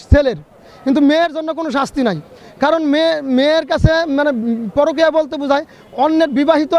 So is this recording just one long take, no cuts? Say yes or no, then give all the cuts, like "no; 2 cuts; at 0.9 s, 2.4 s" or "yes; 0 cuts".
yes; 0 cuts